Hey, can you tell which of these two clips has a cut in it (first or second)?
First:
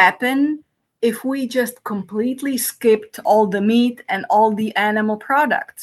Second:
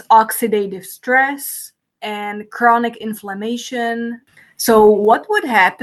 second